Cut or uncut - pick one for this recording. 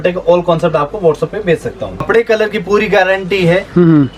cut